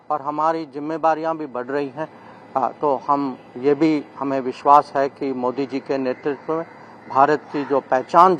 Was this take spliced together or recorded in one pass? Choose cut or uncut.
uncut